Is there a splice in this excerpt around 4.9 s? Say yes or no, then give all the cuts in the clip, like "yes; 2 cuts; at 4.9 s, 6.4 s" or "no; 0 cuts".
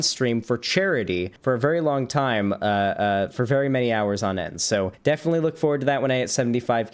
yes; 2 cuts; at 1.3 s, 4.9 s